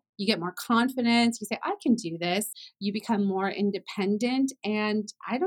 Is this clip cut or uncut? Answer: cut